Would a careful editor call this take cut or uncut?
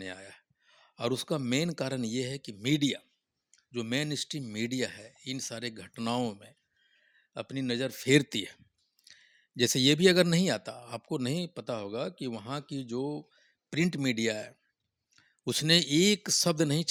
uncut